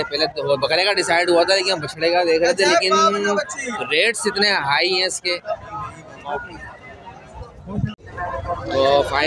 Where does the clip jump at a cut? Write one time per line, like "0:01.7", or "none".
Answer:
0:08.1